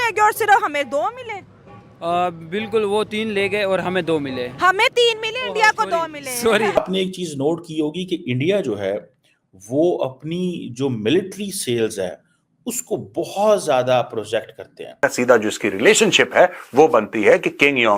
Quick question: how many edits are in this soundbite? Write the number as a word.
two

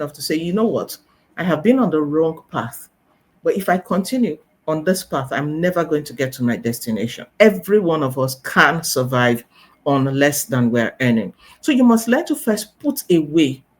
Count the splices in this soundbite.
one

